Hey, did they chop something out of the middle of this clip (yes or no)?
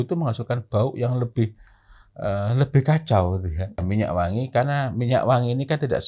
yes